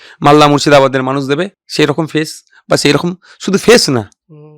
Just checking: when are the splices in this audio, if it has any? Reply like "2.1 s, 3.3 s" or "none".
1.6 s